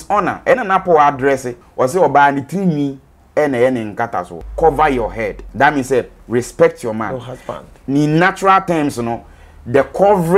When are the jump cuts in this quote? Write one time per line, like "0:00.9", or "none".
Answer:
0:01.6
0:04.4
0:05.4